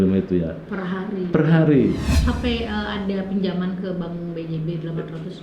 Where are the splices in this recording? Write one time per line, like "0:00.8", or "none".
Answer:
0:02.1